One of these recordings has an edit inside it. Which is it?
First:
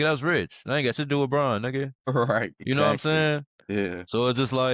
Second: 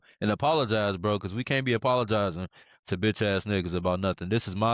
first; 1 cut; at 2.1 s

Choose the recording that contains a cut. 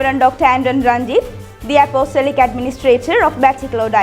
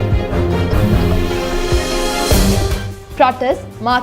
second; 1 cut; at 2.8 s

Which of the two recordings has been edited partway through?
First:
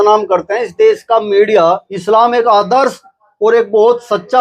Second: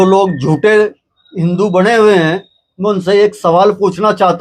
first; 1 cut; at 1.9 s

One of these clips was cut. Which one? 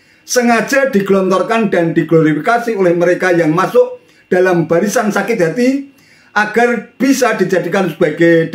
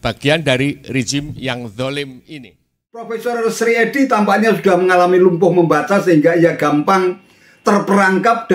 second; 1 cut; at 3.1 s

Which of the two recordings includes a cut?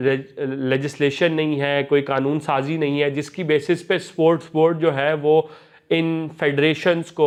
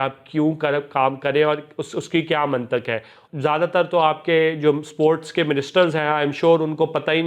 second; 1 cut; at 3.2 s

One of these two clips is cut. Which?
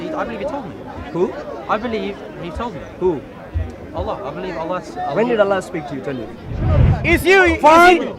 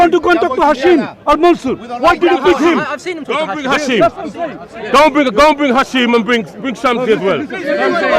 first; 1 cut; at 6.9 s

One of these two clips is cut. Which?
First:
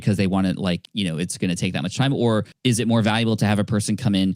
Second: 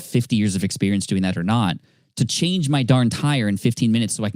first; 2 cuts; at 0.9 s, 2.5 s

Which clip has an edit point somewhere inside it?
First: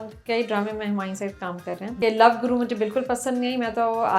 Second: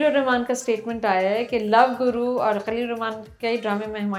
first; 1 cut; at 2.0 s

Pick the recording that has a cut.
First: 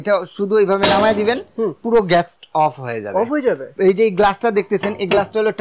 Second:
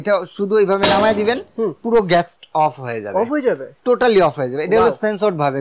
first; 1 cut; at 3.7 s

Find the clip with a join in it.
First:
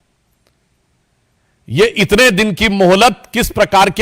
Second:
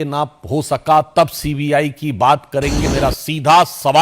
second; 1 cut; at 2.8 s

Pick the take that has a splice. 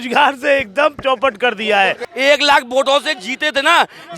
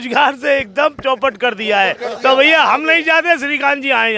first; 1 cut; at 2.0 s

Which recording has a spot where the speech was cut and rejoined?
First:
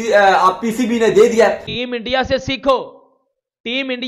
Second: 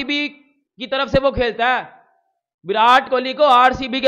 first; 1 cut; at 1.7 s

